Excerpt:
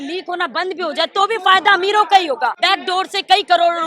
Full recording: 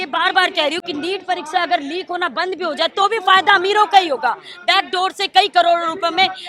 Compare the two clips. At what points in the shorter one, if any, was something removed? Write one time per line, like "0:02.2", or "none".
0:02.6